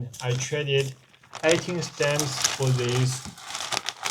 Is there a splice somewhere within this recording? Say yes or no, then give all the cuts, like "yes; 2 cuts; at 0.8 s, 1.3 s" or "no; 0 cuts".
no; 0 cuts